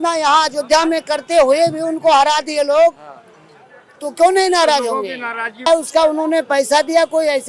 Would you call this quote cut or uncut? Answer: cut